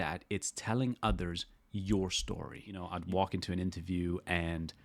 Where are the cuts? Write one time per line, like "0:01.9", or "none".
0:02.9